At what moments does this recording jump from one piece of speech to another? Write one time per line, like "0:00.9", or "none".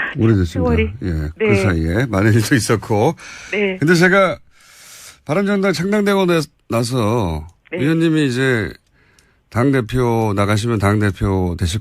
0:01.3